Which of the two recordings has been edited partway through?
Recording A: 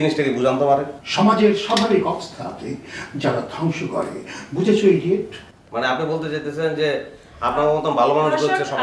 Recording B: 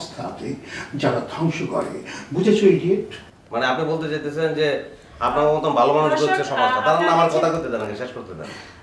A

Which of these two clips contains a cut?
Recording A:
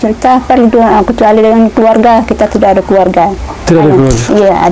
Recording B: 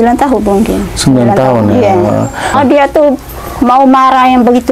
B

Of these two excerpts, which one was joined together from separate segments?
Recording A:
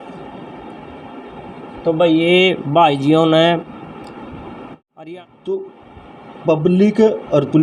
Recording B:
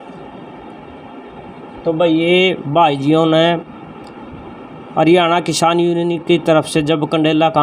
A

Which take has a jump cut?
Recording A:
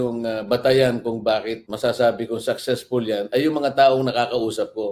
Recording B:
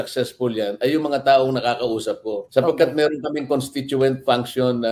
A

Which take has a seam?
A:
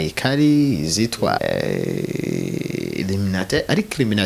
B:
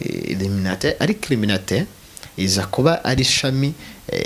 A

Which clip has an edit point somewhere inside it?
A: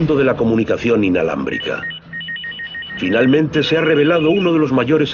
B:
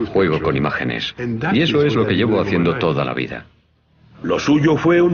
B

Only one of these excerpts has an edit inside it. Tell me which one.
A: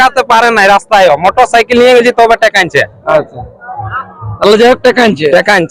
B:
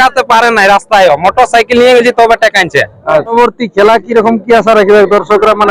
B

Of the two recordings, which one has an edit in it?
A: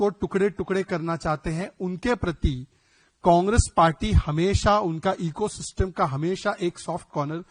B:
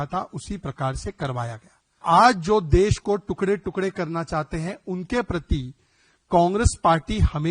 B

